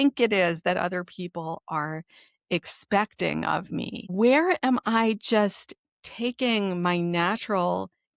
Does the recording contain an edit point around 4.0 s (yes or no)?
yes